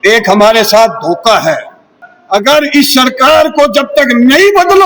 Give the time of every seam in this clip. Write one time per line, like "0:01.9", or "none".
0:02.1